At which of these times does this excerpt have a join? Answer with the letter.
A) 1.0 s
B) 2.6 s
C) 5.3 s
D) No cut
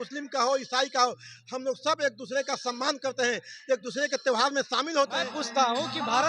C